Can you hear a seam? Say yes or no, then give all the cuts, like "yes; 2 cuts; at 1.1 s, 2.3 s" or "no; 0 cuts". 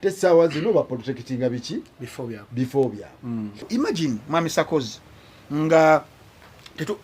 yes; 1 cut; at 3.9 s